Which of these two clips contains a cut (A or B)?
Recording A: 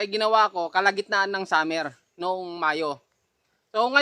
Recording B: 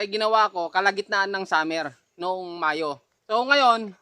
B